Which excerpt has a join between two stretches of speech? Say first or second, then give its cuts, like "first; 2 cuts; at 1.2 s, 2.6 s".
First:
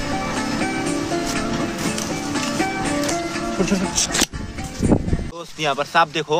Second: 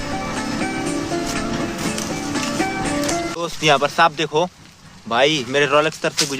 second; 1 cut; at 3.3 s